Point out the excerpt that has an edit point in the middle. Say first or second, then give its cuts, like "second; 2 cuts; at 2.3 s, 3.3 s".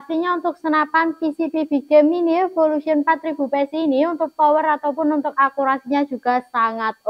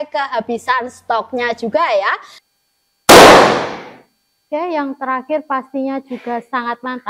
second; 1 cut; at 2.3 s